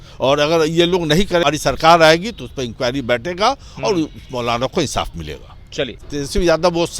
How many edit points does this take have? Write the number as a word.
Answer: two